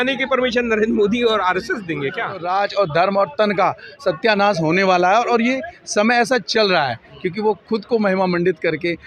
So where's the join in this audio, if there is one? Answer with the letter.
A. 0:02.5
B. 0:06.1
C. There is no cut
A